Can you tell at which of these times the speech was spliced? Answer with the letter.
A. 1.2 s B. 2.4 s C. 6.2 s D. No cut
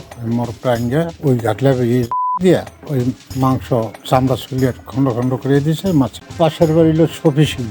C